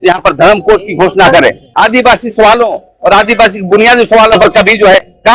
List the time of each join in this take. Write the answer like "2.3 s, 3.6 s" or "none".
1.6 s